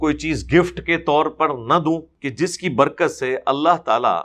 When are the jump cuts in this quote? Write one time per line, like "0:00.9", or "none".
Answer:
0:02.2

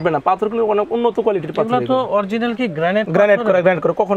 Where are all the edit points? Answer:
none

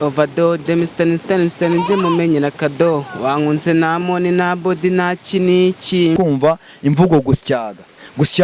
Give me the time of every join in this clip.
0:06.2

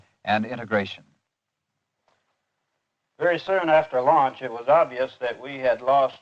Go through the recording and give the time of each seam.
none

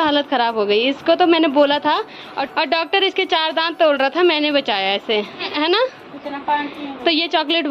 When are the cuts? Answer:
none

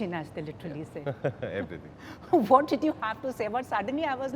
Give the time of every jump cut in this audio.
none

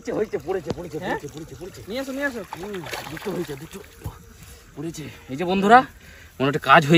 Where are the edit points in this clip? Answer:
none

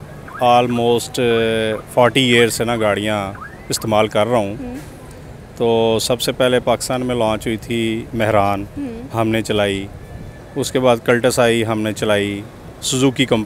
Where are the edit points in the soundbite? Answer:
none

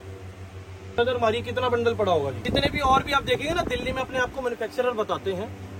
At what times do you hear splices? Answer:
0:01.0
0:02.5

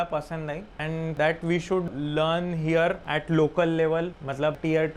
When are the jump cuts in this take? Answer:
none

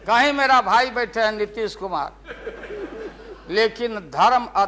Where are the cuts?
none

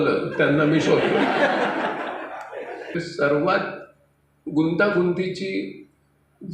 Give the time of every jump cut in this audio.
0:03.0

